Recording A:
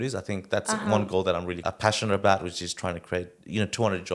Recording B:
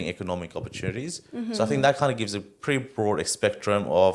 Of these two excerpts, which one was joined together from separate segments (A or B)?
A